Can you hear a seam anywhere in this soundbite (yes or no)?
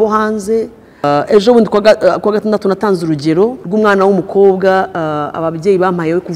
yes